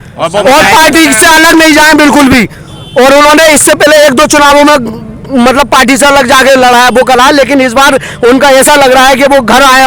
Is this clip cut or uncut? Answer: uncut